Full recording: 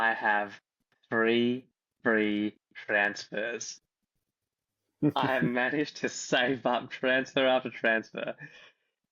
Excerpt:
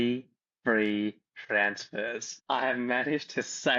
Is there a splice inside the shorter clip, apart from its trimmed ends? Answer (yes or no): yes